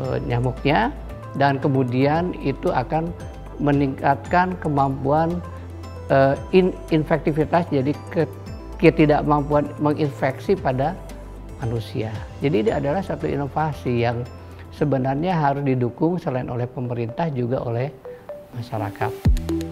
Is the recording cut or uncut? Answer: uncut